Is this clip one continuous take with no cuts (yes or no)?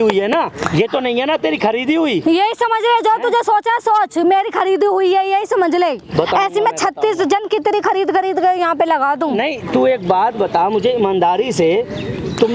yes